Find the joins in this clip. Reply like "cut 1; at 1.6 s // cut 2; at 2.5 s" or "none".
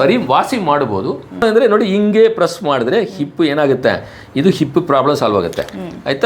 cut 1; at 1.4 s